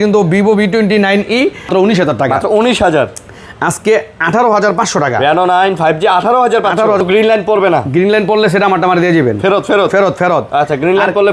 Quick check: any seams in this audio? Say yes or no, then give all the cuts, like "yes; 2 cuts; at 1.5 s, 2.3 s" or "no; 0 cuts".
yes; 2 cuts; at 1.7 s, 7.0 s